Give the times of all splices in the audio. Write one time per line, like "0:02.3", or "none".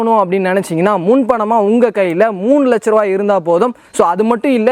none